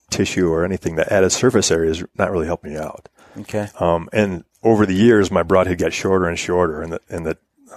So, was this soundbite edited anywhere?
no; 0 cuts

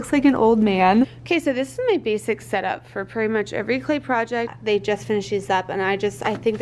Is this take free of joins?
no; 2 cuts; at 1.2 s, 4.6 s

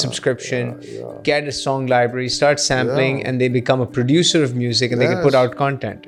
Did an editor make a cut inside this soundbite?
no; 0 cuts

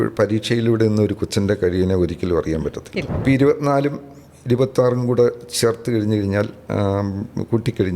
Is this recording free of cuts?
no; 1 cut; at 3.1 s

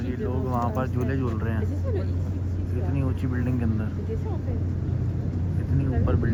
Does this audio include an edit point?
no; 0 cuts

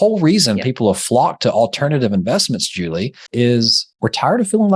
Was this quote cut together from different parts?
yes; 2 cuts; at 3.2 s, 3.8 s

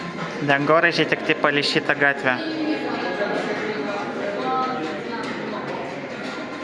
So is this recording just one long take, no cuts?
yes; 0 cuts

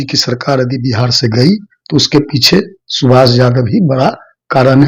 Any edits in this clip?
no; 0 cuts

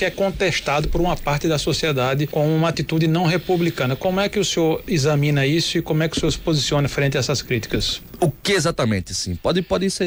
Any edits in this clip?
no; 0 cuts

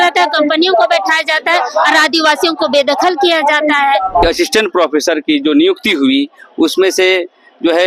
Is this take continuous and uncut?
no; 1 cut; at 4.2 s

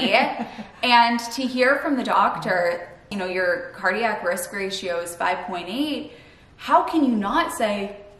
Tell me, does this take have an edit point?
yes; 1 cut; at 3.1 s

